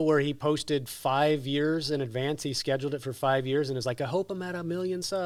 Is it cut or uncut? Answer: uncut